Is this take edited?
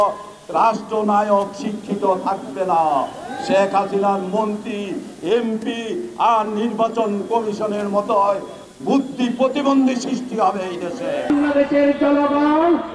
yes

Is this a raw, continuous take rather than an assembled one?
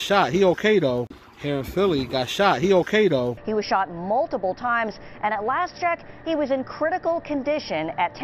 yes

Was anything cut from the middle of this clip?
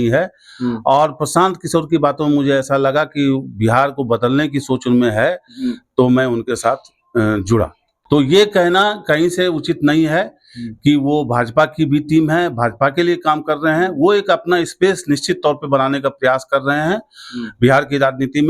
yes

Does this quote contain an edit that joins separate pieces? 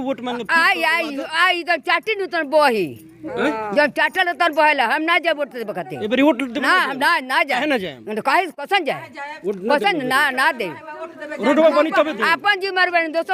no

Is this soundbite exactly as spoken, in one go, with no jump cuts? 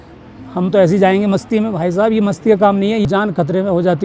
no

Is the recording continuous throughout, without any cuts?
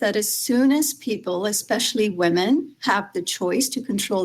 yes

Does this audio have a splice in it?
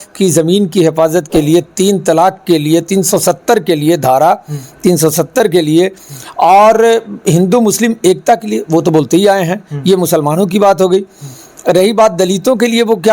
no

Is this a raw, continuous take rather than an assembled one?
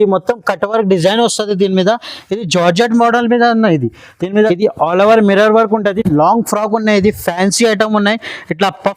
no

